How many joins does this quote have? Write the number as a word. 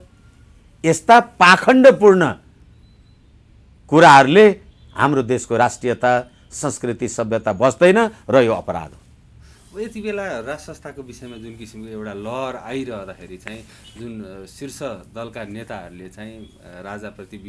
zero